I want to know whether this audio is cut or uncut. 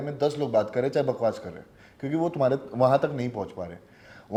uncut